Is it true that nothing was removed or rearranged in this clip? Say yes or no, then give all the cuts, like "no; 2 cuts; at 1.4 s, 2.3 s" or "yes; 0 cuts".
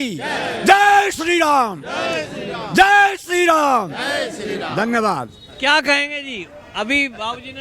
yes; 0 cuts